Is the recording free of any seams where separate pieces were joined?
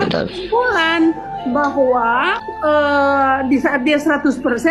no; 1 cut; at 2.4 s

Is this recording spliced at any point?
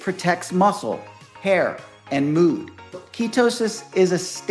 yes; 1 cut; at 3.1 s

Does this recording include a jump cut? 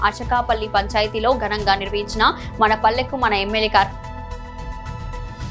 yes; 1 cut; at 4.5 s

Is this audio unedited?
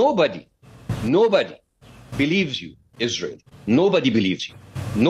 yes; 0 cuts

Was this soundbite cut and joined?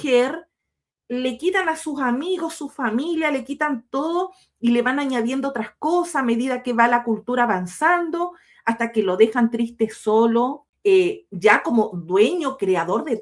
yes; 1 cut; at 10.7 s

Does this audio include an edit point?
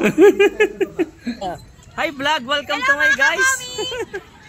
yes; 1 cut; at 1.5 s

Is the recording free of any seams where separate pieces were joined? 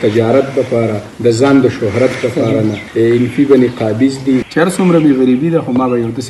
no; 3 cuts; at 1.0 s, 2.8 s, 4.4 s

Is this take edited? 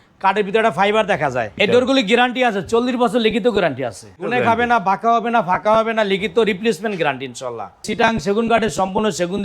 yes; 3 cuts; at 1.5 s, 4.1 s, 7.9 s

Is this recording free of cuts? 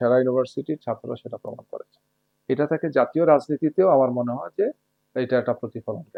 yes; 0 cuts

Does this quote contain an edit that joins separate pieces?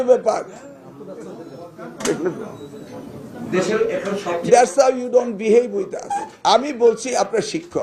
no; 0 cuts

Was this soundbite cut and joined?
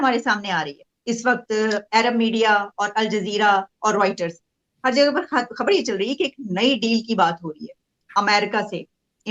yes; 1 cut; at 0.9 s

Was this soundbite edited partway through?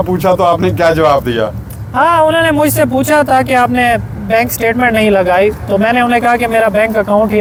no; 0 cuts

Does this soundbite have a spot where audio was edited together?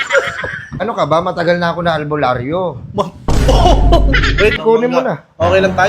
yes; 2 cuts; at 0.8 s, 4.6 s

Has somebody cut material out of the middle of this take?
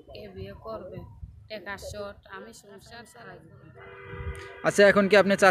yes; 1 cut; at 3.1 s

